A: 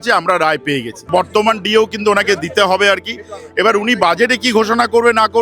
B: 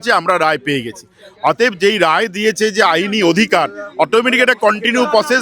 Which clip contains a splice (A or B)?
A